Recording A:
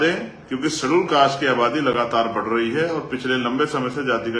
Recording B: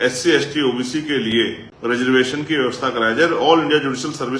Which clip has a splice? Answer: B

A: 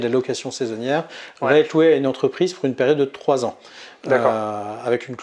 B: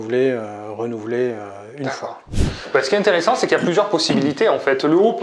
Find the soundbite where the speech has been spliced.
B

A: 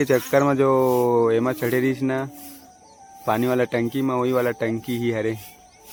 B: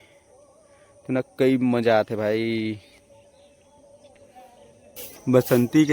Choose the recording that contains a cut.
B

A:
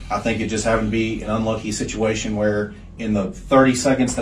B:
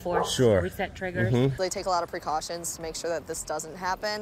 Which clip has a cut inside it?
B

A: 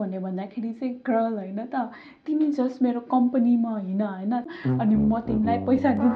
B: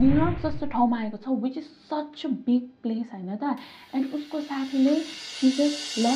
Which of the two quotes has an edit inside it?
A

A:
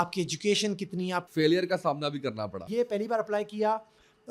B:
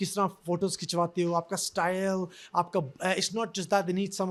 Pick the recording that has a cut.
A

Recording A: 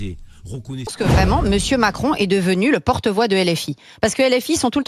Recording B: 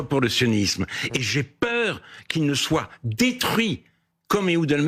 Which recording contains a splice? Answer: A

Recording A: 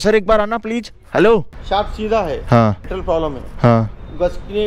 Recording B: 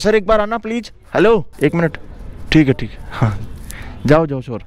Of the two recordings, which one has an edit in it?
A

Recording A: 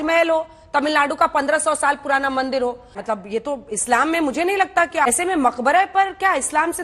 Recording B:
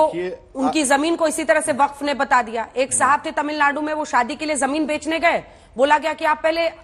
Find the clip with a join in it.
A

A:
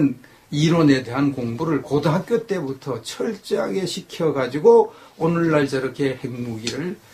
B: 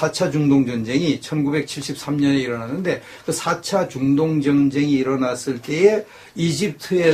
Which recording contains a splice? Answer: A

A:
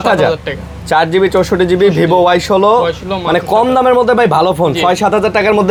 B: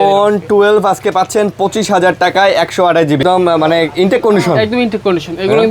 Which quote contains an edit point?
B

